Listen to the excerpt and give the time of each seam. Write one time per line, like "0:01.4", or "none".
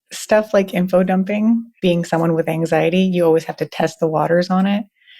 0:01.7